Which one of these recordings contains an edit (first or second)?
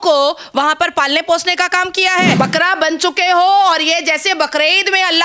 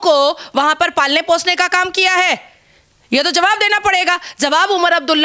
first